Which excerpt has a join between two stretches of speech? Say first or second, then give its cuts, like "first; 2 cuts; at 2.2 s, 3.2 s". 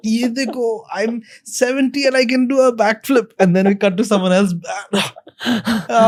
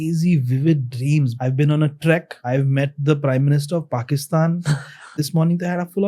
second; 3 cuts; at 1.3 s, 2.3 s, 5.2 s